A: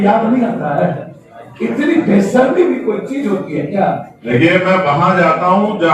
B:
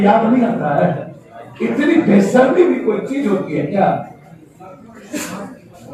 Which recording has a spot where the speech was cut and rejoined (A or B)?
A